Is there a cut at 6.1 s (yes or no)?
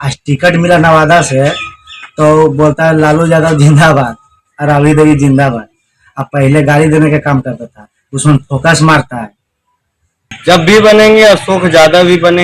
no